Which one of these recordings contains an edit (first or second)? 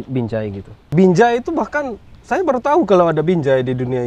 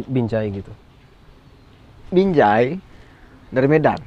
first